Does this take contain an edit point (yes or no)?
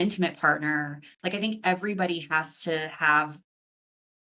no